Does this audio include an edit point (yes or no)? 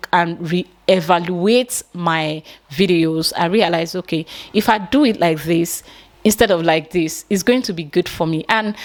no